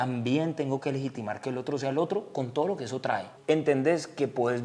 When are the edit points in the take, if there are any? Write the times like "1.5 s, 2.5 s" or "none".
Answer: 3.3 s